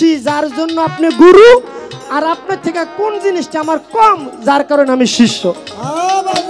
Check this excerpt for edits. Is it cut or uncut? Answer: uncut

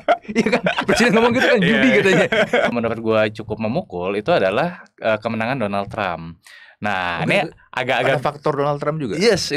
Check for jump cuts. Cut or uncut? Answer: cut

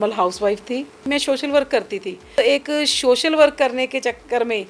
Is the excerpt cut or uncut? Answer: cut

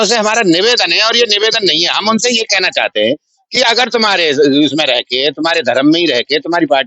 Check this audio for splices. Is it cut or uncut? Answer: uncut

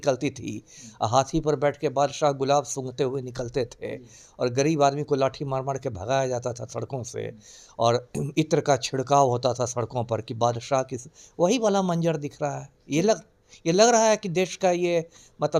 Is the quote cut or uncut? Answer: uncut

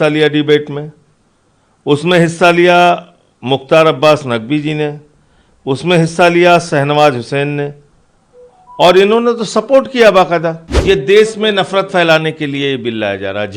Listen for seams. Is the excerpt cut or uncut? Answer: cut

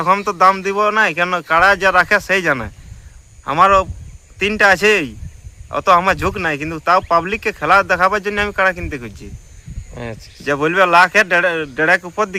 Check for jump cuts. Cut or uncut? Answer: uncut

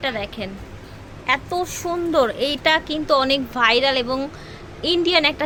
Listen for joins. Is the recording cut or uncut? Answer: uncut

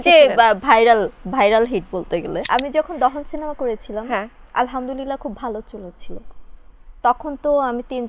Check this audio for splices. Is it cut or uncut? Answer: cut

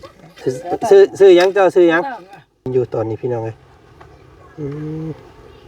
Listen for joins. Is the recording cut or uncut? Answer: cut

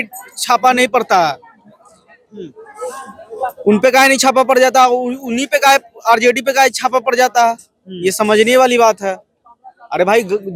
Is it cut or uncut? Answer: uncut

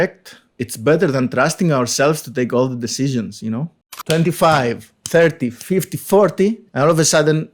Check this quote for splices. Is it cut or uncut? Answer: cut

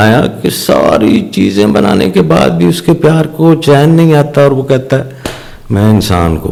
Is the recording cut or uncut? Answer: uncut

